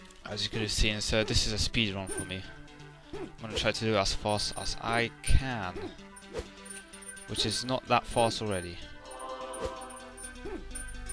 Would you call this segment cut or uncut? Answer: cut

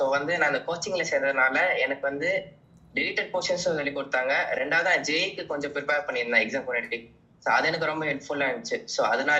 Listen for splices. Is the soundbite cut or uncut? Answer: uncut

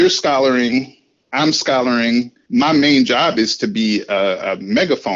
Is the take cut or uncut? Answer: cut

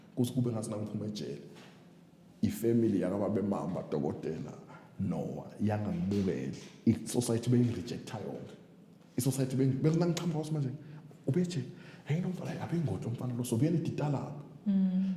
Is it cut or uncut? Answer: uncut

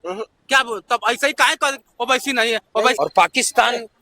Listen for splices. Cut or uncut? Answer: cut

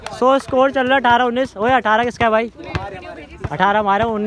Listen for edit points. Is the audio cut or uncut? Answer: uncut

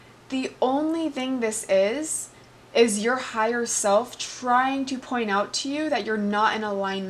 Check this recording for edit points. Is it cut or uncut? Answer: uncut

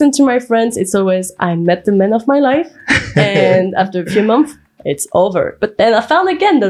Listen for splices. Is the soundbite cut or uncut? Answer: uncut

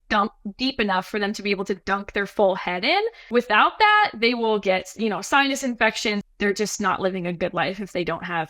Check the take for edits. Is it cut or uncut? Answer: cut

